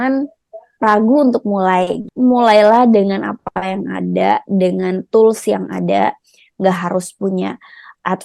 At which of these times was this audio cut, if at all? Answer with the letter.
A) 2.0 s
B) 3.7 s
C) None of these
A